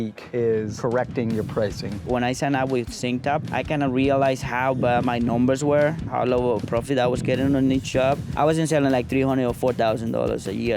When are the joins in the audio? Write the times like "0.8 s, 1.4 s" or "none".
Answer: 2.0 s, 8.3 s